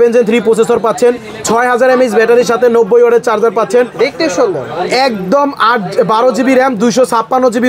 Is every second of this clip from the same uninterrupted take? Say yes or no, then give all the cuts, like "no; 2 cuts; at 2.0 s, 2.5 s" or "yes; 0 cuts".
yes; 0 cuts